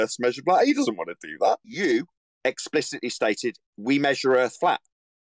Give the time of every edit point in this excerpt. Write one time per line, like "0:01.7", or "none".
0:01.7